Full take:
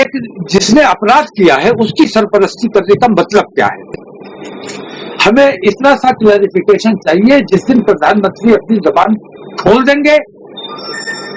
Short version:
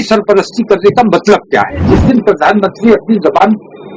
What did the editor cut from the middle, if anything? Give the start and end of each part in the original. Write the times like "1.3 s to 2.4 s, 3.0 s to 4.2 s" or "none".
3.9 s to 7.5 s